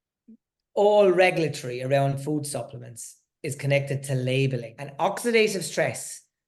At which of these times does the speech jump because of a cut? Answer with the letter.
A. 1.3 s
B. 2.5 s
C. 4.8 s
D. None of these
C